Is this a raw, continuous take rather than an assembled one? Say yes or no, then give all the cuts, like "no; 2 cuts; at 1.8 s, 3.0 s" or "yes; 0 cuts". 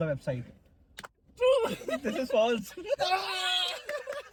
yes; 0 cuts